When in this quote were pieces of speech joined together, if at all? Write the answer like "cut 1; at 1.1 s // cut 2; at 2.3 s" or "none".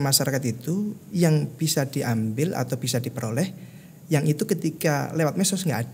none